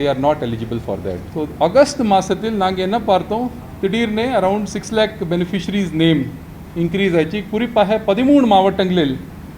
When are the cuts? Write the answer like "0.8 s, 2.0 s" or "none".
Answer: 1.2 s